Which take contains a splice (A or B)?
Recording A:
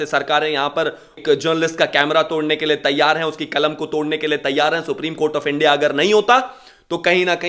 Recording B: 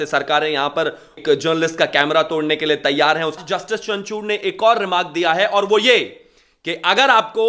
B